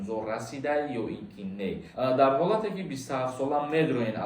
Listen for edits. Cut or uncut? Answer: cut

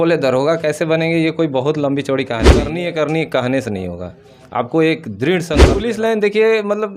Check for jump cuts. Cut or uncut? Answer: cut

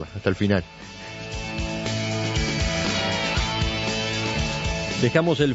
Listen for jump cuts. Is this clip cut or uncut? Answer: cut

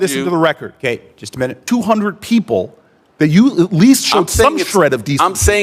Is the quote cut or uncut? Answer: cut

